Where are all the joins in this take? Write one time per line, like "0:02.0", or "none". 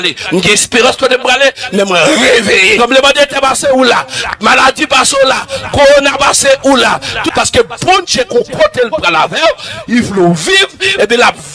0:02.8
0:07.2